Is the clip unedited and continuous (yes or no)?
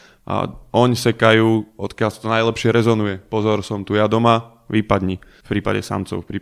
no